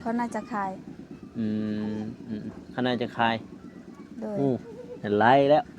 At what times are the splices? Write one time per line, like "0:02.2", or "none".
none